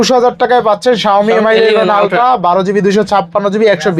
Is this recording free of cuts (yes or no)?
yes